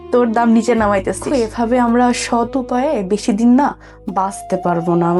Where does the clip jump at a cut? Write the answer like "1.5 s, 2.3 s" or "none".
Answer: 1.2 s